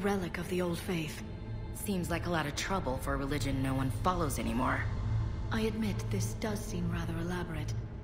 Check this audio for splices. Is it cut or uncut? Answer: uncut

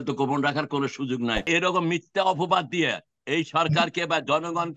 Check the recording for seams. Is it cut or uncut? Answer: cut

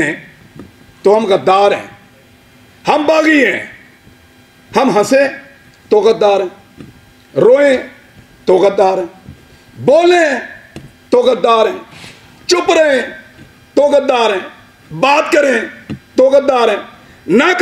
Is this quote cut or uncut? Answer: uncut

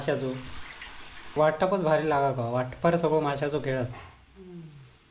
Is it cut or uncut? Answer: cut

